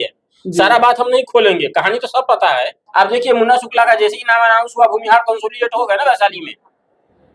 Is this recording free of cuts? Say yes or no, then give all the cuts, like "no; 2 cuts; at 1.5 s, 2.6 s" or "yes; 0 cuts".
no; 1 cut; at 2.8 s